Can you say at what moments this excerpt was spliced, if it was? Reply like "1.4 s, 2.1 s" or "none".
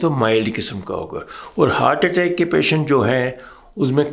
none